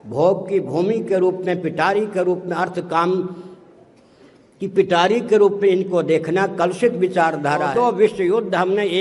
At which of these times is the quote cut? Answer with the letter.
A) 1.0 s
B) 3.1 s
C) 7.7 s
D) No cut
C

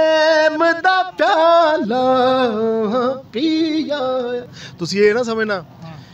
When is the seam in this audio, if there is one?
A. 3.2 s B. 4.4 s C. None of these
C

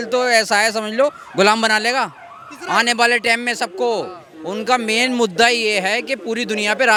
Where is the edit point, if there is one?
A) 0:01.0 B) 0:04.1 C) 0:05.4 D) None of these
D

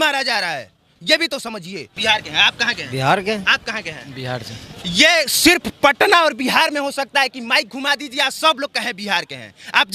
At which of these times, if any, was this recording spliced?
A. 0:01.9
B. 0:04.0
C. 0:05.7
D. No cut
A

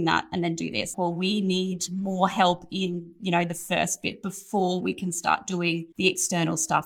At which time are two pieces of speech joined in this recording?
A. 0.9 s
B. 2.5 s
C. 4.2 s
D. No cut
A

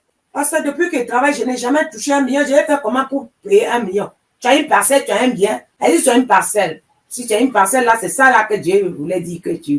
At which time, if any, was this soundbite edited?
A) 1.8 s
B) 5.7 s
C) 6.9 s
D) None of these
B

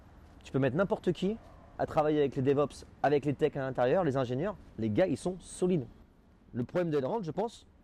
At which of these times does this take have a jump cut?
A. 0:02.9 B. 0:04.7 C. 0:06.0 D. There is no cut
D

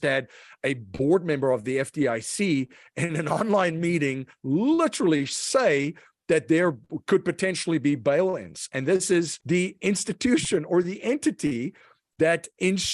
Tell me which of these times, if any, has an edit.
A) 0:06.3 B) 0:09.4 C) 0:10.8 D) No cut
B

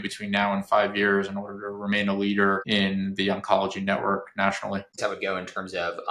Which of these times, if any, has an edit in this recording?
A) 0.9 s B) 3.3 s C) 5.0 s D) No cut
C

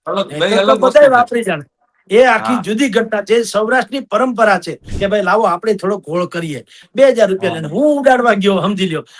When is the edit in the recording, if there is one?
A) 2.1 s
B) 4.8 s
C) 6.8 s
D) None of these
B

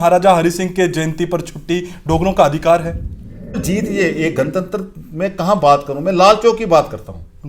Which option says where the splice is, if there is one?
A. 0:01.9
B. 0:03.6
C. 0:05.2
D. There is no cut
B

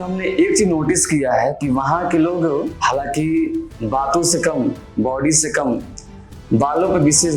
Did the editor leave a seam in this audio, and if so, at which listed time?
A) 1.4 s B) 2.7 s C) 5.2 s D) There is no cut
B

